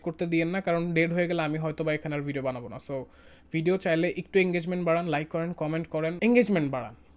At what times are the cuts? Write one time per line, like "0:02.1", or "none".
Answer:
0:06.2

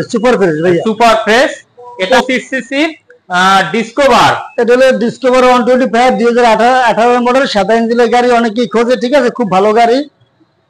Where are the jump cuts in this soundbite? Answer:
0:02.0

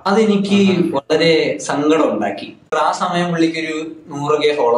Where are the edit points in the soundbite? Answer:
0:02.7

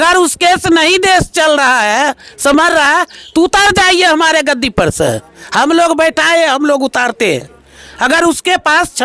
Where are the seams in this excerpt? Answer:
none

